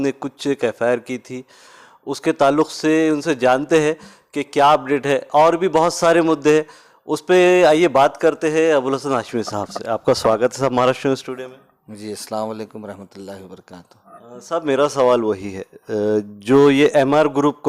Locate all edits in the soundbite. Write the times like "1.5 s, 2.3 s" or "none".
none